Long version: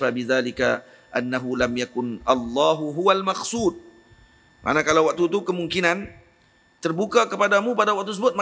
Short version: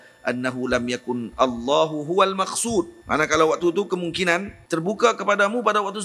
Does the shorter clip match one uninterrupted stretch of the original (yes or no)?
no